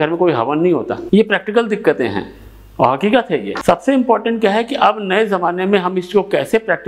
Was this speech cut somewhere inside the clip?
yes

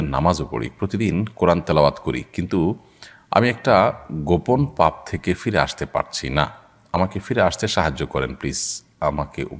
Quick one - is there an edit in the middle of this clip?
no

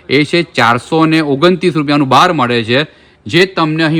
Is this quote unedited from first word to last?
yes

